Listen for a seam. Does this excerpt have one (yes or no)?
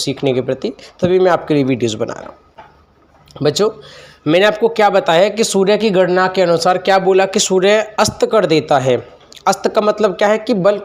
no